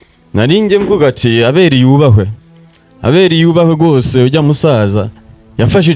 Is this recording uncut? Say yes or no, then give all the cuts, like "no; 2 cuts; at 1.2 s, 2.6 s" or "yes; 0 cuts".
yes; 0 cuts